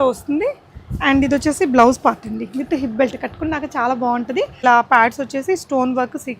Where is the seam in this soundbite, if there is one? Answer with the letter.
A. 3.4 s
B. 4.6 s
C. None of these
B